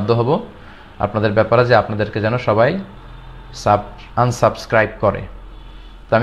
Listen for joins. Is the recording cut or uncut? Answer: uncut